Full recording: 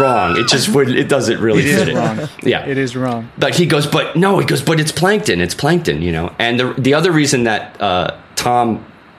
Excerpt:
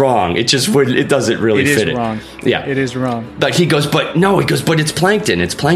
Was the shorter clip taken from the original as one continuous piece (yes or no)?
yes